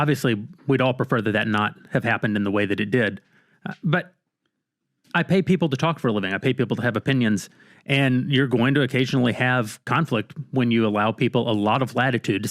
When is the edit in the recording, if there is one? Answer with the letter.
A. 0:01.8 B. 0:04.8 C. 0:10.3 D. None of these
B